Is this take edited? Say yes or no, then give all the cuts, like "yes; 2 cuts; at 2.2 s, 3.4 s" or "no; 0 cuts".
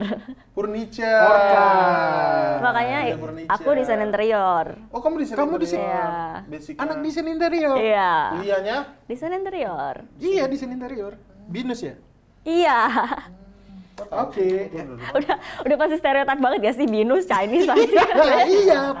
no; 0 cuts